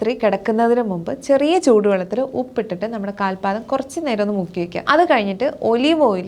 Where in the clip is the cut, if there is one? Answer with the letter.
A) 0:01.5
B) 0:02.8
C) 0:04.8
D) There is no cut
C